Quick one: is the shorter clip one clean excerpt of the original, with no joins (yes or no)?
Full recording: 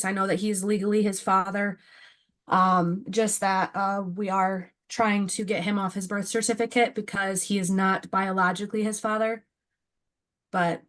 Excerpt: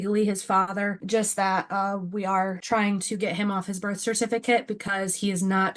no